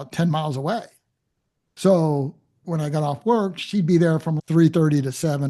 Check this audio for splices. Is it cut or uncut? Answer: uncut